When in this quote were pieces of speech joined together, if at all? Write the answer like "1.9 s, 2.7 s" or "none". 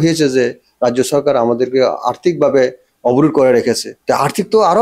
3.9 s